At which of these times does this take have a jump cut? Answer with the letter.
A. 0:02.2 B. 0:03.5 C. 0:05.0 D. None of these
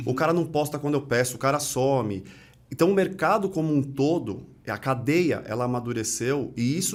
D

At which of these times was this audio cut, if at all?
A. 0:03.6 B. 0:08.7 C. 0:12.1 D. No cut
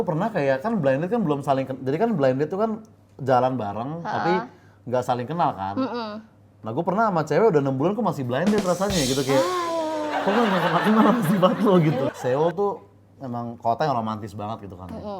C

